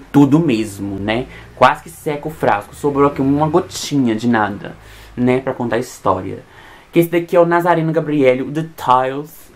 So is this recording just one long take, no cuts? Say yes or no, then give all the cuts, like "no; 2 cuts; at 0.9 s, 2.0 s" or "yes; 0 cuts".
yes; 0 cuts